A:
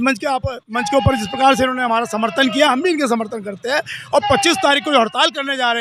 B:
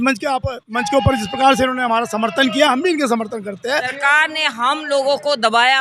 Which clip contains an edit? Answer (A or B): B